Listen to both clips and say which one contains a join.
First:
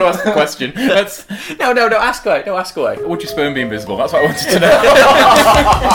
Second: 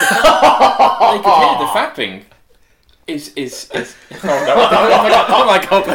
first; 1 cut; at 3.1 s

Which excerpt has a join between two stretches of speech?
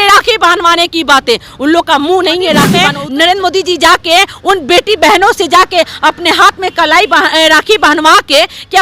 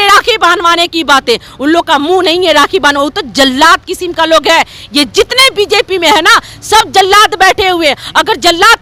first; 1 cut; at 2.8 s

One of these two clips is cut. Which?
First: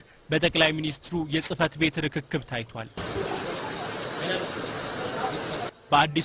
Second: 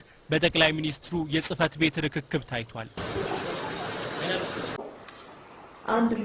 second; 1 cut; at 4.9 s

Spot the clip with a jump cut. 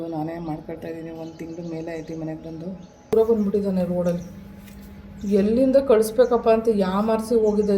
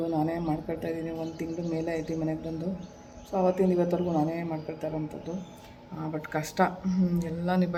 first; 1 cut; at 3.1 s

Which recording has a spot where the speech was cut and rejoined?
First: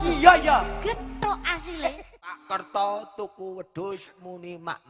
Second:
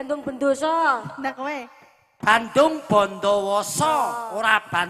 first; 1 cut; at 2.4 s

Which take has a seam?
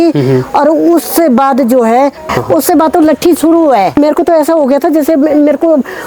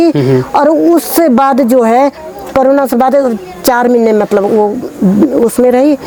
first; 2 cuts; at 2.3 s, 3.9 s

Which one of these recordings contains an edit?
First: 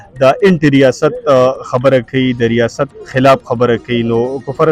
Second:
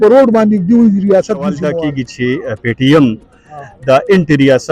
second; 1 cut; at 1.7 s

